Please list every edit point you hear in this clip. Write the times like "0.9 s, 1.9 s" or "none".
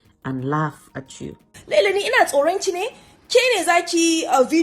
1.5 s